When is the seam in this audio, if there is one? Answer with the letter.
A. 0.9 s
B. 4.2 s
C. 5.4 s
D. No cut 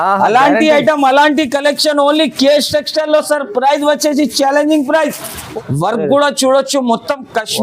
C